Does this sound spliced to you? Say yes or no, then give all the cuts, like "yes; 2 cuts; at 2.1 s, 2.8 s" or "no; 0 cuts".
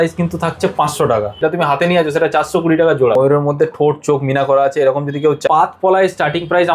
yes; 3 cuts; at 1.4 s, 3.2 s, 5.4 s